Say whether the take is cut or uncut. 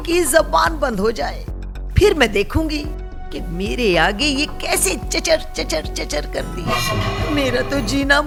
uncut